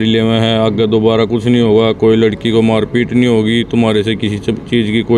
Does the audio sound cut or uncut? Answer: uncut